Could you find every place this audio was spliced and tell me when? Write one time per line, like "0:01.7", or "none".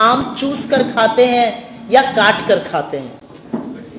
none